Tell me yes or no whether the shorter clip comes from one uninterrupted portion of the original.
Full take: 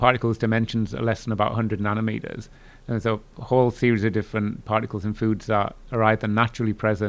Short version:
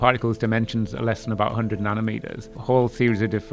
no